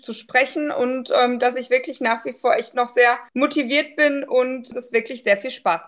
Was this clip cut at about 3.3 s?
yes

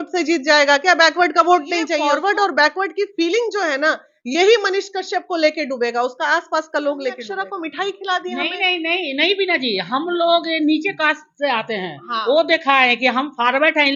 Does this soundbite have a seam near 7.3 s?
yes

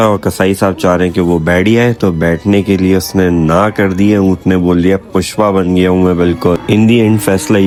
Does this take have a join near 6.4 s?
no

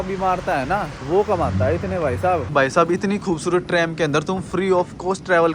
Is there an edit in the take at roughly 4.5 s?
no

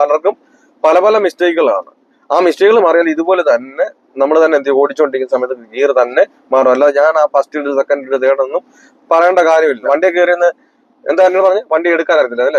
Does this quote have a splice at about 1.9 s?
no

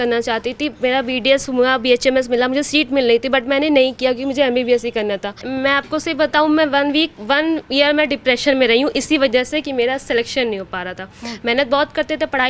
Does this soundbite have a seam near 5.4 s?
yes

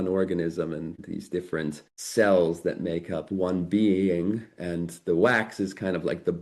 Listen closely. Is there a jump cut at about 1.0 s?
yes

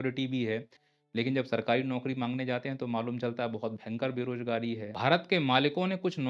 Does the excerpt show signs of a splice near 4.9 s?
yes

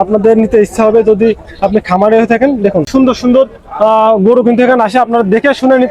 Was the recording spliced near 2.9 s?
yes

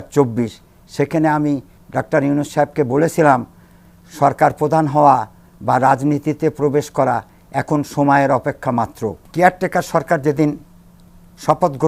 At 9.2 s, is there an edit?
yes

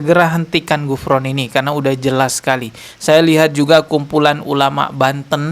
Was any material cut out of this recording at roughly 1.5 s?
no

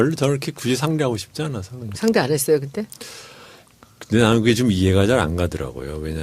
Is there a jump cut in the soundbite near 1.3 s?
no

